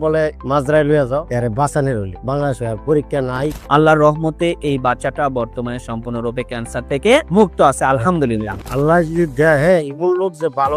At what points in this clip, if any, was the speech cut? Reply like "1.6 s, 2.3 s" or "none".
1.3 s, 3.6 s, 8.6 s